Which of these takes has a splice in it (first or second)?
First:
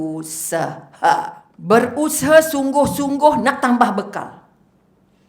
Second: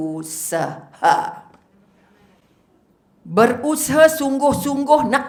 first